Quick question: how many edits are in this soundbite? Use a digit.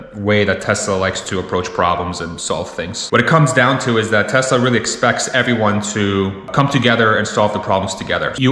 1